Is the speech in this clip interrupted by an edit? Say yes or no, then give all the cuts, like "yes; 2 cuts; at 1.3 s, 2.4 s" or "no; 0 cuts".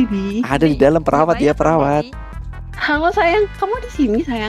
yes; 1 cut; at 2.8 s